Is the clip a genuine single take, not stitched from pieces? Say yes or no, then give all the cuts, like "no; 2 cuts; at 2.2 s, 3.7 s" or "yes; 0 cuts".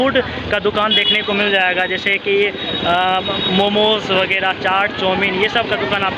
yes; 0 cuts